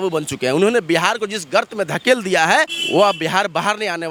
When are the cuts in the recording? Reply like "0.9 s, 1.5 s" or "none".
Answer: none